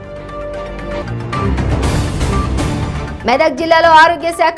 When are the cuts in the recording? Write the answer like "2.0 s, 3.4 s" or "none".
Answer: 1.0 s